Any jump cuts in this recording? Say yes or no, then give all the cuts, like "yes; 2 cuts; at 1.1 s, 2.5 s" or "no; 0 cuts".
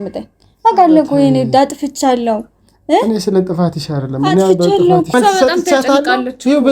yes; 1 cut; at 5.1 s